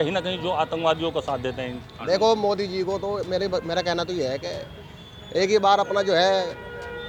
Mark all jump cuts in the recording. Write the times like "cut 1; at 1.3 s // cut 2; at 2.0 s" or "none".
none